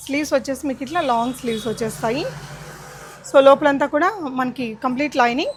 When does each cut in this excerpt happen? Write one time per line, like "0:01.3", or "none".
none

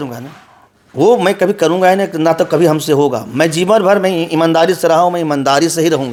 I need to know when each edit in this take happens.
none

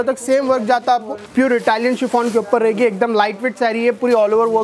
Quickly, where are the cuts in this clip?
0:01.2

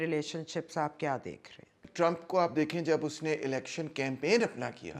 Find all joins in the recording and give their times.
0:01.8

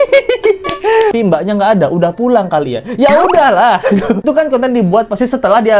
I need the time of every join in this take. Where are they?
0:01.1

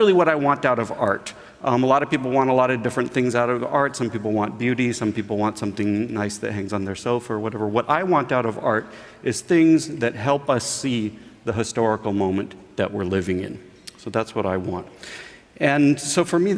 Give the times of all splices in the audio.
0:03.9

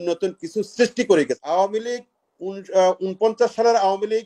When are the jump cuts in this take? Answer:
0:01.4

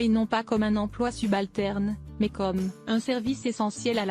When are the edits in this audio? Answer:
none

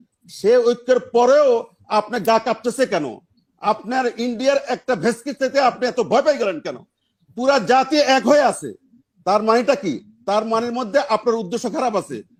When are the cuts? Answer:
none

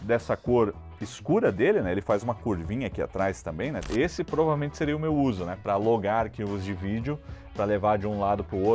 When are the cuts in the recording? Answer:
0:03.8

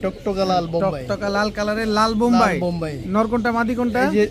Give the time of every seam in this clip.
none

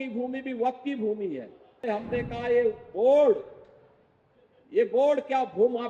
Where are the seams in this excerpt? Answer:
0:01.8

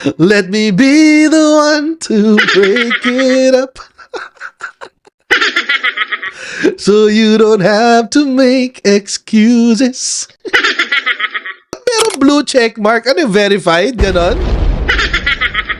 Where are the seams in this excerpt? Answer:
0:11.7

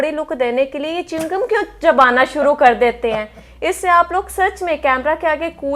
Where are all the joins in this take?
none

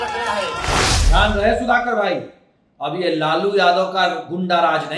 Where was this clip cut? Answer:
0:00.9

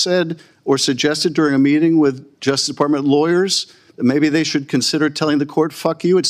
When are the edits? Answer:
none

